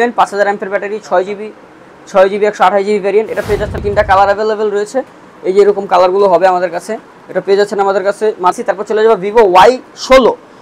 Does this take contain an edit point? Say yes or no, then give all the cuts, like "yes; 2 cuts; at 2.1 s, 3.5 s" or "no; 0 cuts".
yes; 2 cuts; at 3.8 s, 8.6 s